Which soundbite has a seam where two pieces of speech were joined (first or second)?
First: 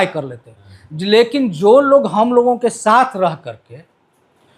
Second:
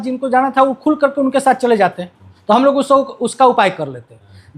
second